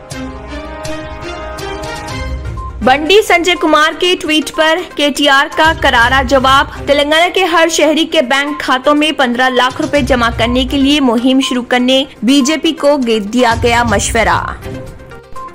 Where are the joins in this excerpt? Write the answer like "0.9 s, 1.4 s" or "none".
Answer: none